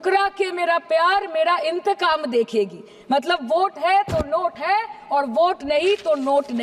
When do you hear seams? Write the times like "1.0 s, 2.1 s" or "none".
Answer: none